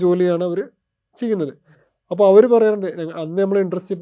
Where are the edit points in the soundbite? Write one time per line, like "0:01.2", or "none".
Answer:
none